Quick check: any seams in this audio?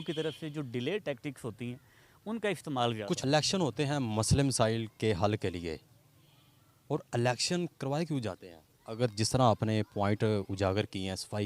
yes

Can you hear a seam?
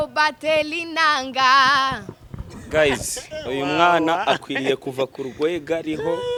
no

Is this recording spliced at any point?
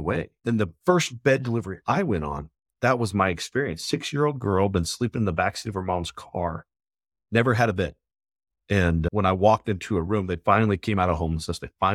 no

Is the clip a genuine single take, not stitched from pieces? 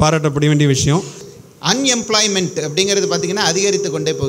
no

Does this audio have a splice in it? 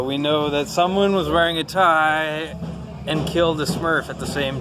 no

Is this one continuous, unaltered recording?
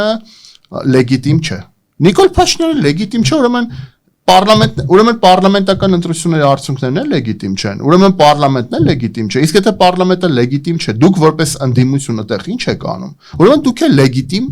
yes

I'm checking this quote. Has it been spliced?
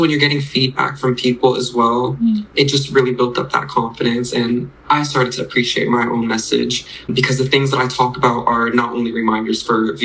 yes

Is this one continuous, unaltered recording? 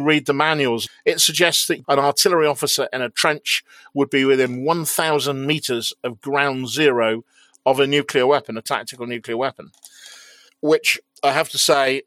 no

